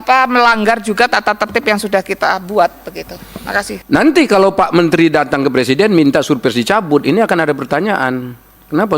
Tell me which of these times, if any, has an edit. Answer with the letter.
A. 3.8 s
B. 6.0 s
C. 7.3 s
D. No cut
A